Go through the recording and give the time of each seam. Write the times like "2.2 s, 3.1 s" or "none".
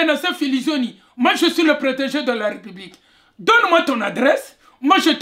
none